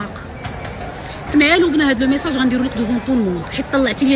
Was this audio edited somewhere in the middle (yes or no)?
no